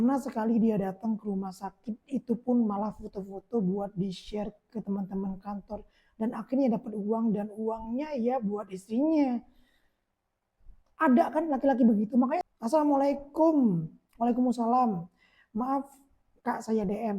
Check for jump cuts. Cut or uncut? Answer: cut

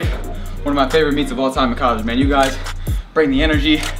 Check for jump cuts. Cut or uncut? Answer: uncut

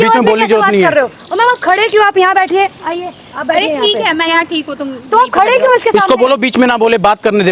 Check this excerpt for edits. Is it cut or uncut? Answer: uncut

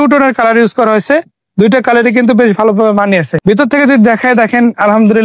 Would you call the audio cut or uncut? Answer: cut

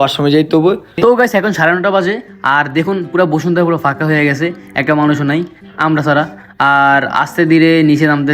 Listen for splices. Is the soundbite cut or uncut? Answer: cut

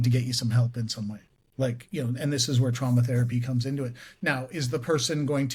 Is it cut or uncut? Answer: uncut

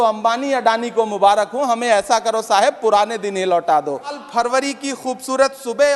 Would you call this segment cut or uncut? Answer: cut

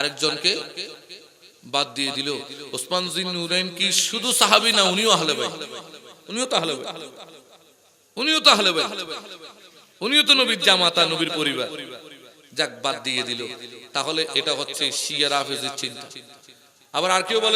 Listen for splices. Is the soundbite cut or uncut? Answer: uncut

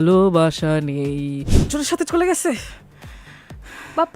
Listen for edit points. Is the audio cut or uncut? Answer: cut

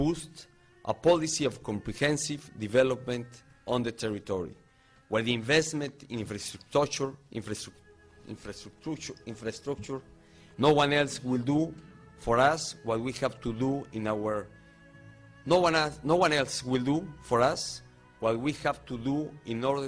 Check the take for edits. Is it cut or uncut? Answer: uncut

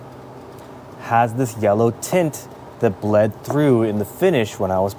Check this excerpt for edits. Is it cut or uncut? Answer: uncut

